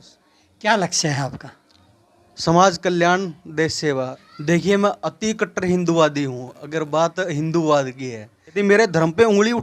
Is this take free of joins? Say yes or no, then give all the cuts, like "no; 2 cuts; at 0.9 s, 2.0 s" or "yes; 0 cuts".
no; 2 cuts; at 4.2 s, 8.6 s